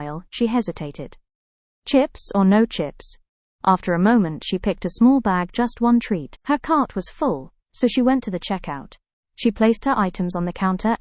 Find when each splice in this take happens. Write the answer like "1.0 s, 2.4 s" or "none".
none